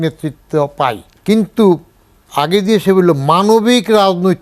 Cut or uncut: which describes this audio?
cut